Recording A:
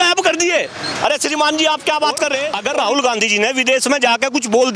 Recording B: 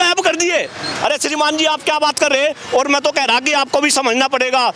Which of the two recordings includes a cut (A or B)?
A